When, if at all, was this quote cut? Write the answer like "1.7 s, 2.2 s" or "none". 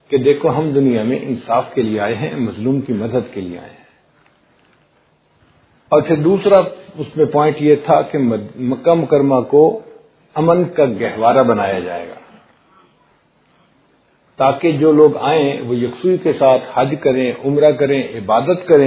none